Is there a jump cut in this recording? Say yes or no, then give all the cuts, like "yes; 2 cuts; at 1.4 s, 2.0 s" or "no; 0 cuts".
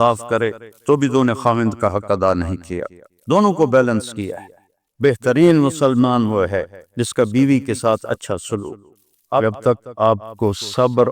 yes; 1 cut; at 9.4 s